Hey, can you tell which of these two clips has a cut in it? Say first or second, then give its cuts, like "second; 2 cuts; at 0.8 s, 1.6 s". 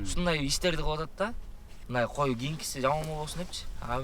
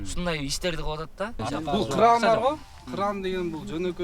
second; 1 cut; at 1.4 s